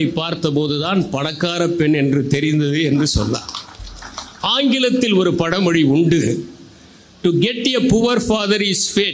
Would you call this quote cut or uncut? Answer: uncut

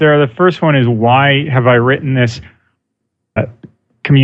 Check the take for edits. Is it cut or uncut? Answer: uncut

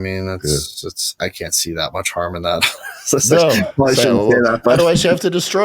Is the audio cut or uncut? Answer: cut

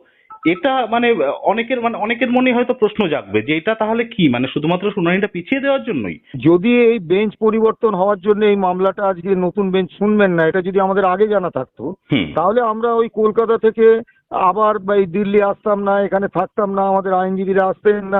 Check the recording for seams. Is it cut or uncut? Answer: cut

